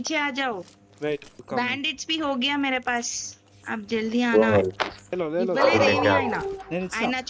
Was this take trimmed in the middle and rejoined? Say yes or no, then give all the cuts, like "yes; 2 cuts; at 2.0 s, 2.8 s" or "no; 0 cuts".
yes; 1 cut; at 5.2 s